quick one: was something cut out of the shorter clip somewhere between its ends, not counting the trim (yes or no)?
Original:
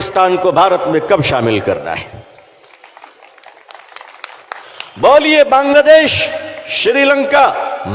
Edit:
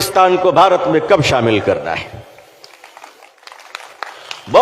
yes